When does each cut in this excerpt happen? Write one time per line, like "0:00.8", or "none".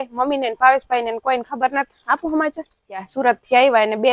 0:03.1

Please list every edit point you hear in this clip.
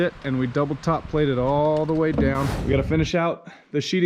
0:02.5

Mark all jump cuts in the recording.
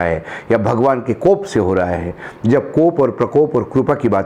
none

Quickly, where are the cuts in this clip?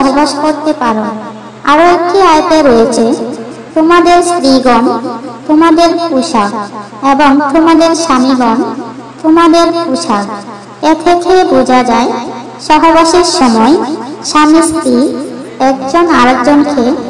none

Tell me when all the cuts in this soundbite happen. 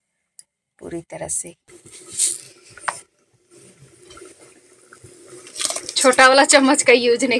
0:01.6

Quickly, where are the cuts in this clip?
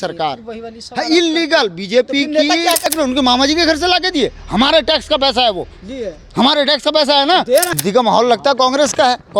0:02.9
0:07.7

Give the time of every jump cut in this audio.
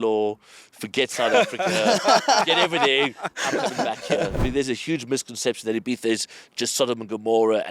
0:04.4

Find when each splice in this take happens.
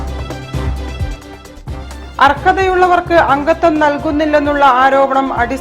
none

